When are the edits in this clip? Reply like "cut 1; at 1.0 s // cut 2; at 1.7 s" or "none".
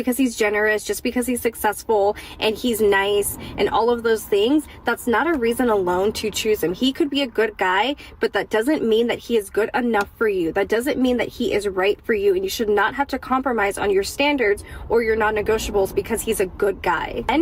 cut 1; at 10.8 s // cut 2; at 12.5 s // cut 3; at 14.7 s